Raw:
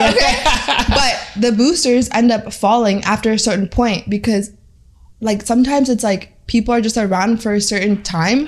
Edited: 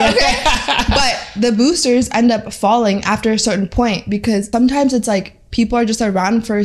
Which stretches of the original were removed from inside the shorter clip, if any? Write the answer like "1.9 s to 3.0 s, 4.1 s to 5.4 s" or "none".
4.5 s to 5.4 s